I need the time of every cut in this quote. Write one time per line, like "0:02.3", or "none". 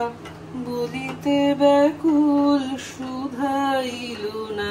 none